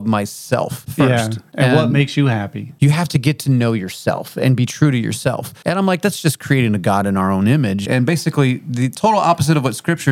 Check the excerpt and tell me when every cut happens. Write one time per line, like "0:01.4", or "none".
0:00.9
0:02.6
0:05.5
0:07.8